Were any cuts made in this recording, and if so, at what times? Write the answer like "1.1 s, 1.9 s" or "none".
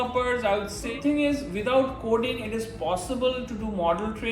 0.9 s

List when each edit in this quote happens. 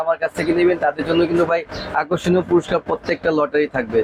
none

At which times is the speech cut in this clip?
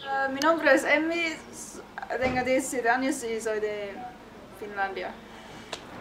4.0 s

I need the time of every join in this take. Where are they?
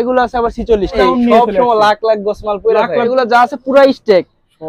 1.0 s, 3.1 s

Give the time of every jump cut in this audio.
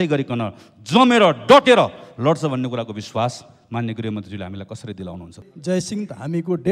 5.4 s

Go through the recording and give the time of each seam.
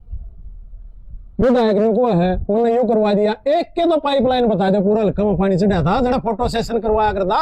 none

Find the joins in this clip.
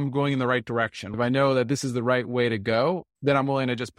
1.0 s, 3.1 s

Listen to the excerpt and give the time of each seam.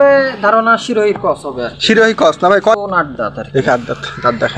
2.8 s

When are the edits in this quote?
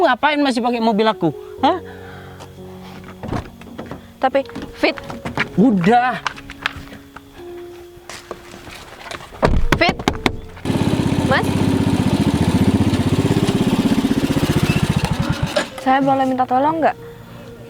10.7 s

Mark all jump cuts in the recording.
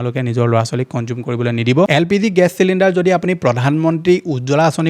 1.9 s

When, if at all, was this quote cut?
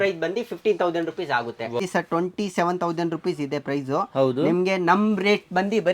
1.8 s

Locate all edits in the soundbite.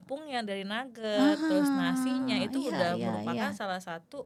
none

